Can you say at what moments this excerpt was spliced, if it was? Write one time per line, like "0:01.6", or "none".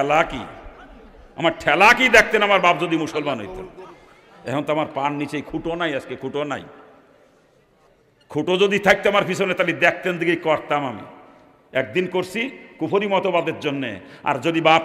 0:05.5